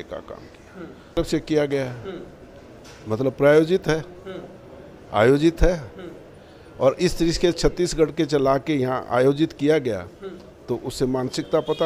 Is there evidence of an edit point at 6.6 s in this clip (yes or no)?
no